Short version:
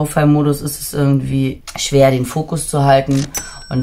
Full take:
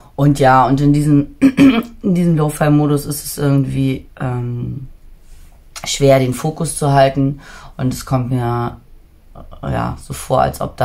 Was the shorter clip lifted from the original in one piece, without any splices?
no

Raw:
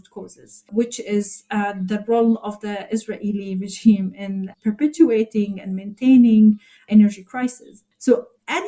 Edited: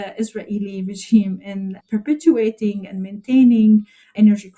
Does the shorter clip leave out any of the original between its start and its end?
no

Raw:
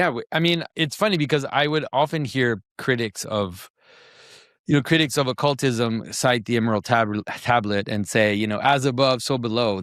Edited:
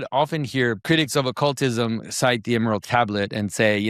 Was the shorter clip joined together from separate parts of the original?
yes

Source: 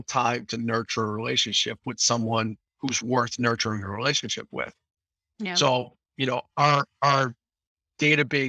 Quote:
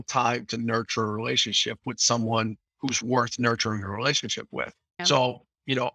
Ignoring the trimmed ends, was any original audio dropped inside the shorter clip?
yes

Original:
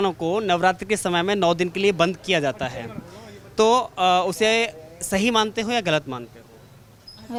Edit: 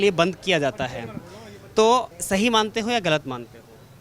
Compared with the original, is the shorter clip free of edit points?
no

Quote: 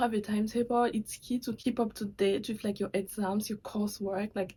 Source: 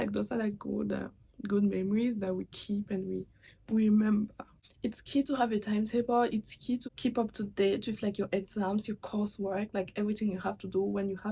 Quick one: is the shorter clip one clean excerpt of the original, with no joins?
yes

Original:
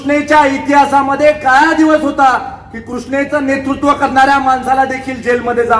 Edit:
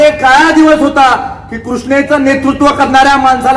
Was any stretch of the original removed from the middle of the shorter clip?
no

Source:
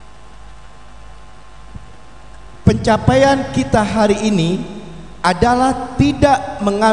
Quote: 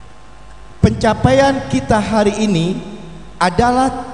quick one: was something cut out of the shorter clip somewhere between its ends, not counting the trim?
no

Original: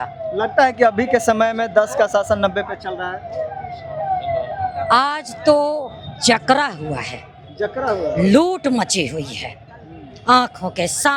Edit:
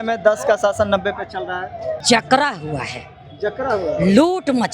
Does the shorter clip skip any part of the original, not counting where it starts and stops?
yes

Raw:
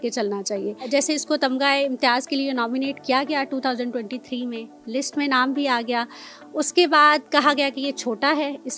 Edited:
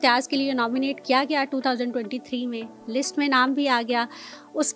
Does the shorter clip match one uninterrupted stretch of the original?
yes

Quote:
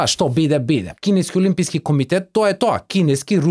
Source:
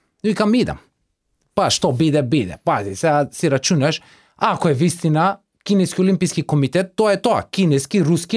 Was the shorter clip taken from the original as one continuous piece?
no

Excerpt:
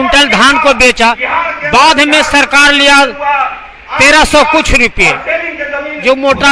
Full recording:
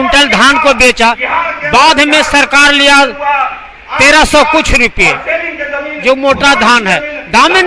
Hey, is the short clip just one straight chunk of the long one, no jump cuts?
yes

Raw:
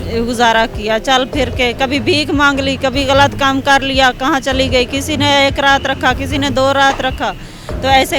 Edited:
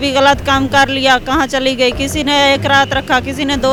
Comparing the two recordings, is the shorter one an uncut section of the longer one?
yes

